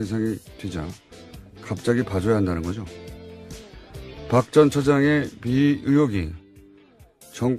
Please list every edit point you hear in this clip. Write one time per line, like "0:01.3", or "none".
0:01.6

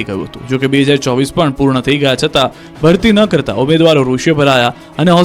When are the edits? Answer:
none

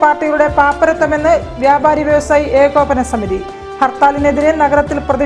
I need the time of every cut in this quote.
none

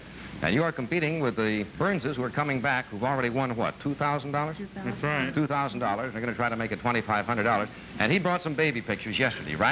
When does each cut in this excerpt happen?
0:08.4

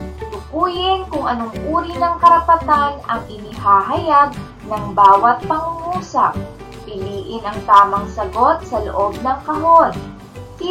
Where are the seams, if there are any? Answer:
none

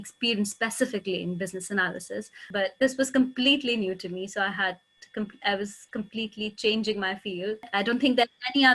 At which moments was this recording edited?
0:02.5
0:07.7

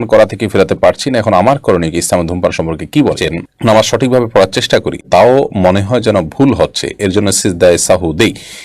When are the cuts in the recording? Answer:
0:03.2

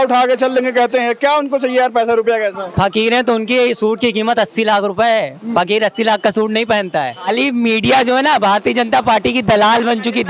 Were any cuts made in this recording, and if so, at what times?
0:07.3

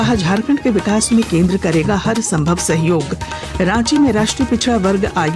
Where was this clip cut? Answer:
none

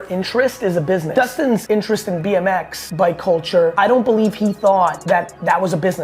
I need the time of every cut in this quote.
0:01.4
0:02.8
0:03.7
0:05.0

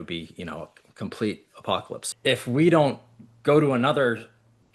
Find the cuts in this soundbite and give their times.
0:01.9

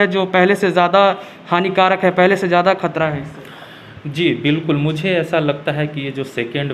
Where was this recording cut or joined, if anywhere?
0:05.8

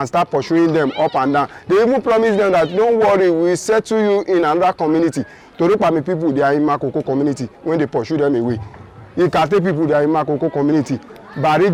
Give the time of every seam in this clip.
none

